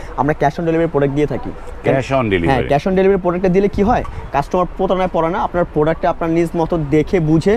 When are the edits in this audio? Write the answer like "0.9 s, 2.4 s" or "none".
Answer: none